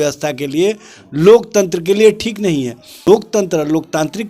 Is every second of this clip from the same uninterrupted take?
no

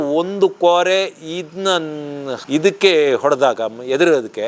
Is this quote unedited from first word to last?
yes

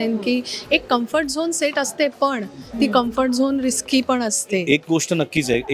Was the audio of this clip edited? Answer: yes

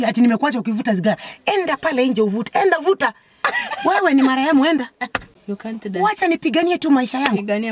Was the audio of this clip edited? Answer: yes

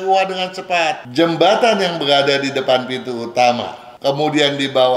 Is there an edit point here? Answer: yes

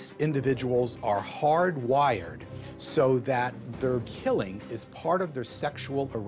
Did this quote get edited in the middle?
yes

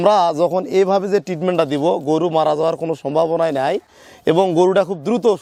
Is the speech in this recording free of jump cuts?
yes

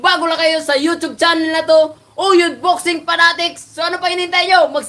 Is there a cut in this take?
no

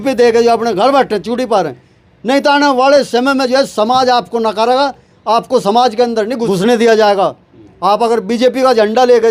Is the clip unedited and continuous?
yes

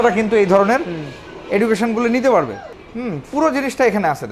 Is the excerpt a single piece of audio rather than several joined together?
yes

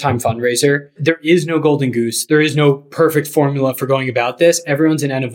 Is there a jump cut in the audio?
yes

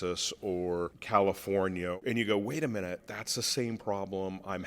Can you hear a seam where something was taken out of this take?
yes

